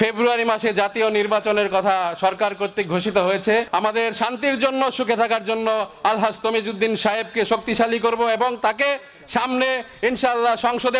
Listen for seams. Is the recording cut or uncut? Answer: cut